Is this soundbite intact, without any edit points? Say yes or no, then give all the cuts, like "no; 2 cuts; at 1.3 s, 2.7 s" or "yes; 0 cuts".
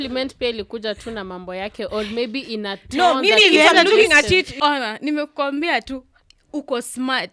no; 1 cut; at 4.5 s